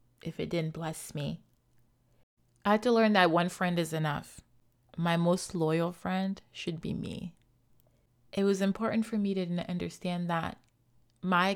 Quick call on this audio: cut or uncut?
cut